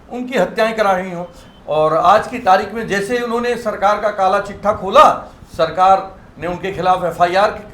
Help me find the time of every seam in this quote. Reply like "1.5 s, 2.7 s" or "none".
1.4 s